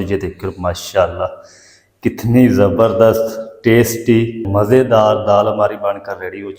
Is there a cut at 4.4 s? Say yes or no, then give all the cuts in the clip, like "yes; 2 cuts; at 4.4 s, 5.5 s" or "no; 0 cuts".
yes; 1 cut; at 4.4 s